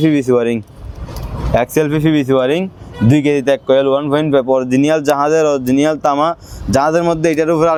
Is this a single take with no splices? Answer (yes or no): yes